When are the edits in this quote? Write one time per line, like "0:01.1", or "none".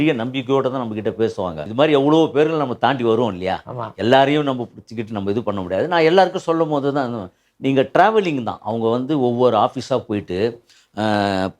0:01.6